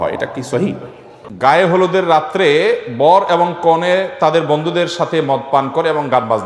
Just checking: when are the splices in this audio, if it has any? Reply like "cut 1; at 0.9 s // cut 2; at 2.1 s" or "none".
cut 1; at 1.3 s